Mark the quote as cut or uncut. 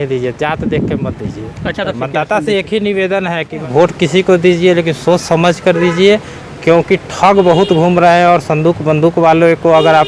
cut